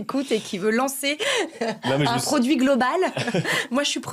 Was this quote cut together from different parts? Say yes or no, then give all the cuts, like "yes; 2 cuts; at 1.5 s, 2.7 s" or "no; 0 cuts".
no; 0 cuts